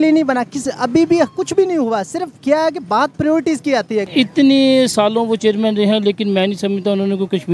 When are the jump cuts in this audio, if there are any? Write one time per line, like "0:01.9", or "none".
0:04.1